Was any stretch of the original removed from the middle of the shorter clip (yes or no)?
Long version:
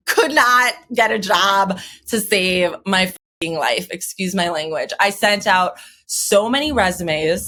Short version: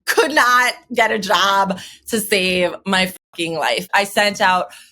yes